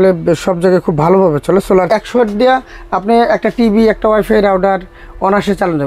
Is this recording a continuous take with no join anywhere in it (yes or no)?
no